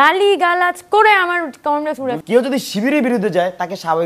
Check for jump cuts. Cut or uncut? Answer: cut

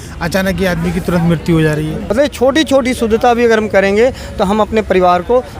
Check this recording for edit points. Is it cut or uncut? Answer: cut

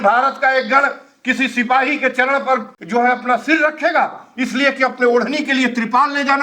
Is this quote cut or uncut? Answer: cut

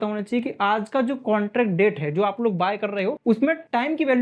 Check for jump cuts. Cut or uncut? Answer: cut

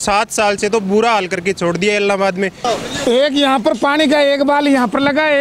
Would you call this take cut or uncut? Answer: cut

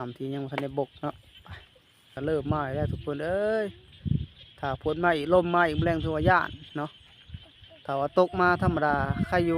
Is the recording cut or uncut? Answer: cut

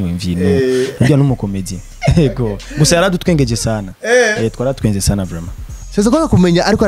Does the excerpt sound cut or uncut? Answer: cut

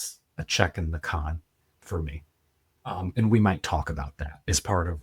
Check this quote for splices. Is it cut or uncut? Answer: uncut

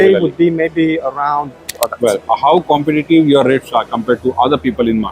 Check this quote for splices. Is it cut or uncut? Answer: cut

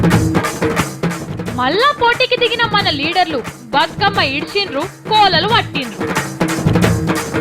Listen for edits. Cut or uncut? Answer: cut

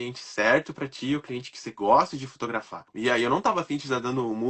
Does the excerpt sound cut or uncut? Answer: cut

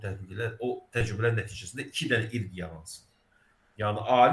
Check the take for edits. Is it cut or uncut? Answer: uncut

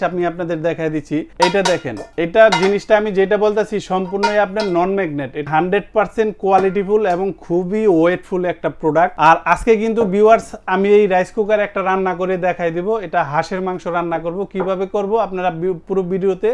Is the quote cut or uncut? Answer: cut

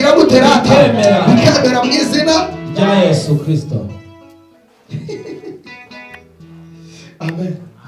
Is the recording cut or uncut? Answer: uncut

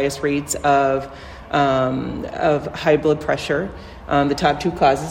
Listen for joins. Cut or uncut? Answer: uncut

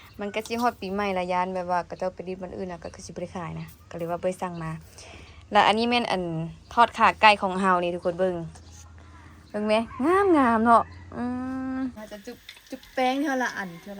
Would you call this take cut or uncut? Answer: cut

